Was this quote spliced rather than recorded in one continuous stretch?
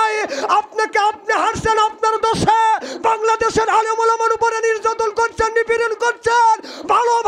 no; 0 cuts

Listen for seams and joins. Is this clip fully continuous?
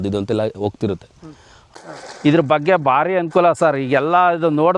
no; 1 cut; at 1.7 s

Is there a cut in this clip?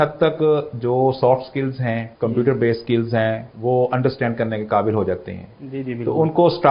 yes; 2 cuts; at 2.1 s, 3.5 s

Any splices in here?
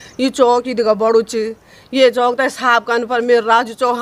no; 0 cuts

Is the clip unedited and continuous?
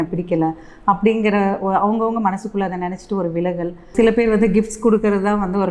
no; 1 cut; at 3.9 s

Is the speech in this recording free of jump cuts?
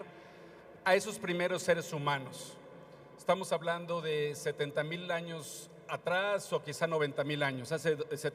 no; 1 cut; at 7.3 s

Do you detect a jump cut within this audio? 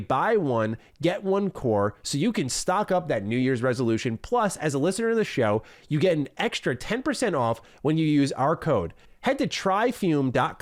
no; 0 cuts

